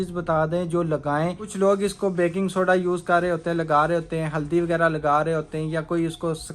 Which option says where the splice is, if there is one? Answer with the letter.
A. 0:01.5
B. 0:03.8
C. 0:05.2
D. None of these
A